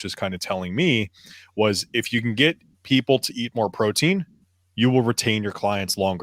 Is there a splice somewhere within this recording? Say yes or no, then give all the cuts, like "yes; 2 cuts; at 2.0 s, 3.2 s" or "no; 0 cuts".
no; 0 cuts